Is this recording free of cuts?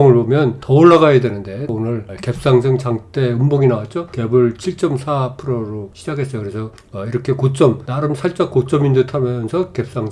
no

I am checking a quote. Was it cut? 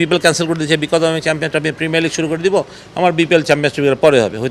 no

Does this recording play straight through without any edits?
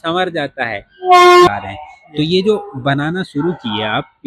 no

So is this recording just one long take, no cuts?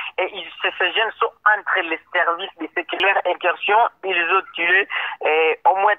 no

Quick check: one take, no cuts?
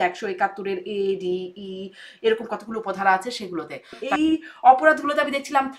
no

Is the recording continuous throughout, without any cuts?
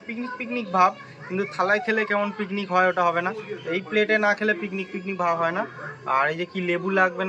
yes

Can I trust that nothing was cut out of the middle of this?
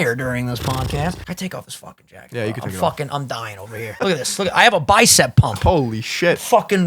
no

